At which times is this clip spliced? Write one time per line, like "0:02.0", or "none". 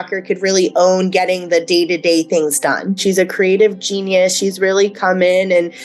0:03.0